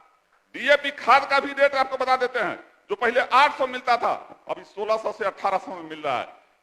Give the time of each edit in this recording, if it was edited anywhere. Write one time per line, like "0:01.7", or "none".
none